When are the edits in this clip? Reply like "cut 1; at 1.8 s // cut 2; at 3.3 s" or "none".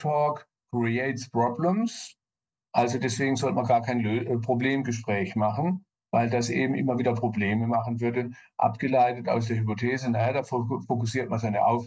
none